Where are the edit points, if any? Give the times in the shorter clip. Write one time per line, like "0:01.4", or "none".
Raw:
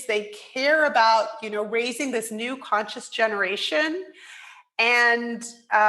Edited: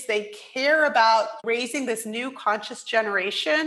0:01.4